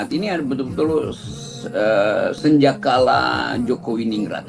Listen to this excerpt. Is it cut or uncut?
uncut